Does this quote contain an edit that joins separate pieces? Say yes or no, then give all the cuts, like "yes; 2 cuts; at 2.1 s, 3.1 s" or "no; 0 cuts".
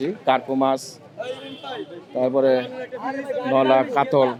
no; 0 cuts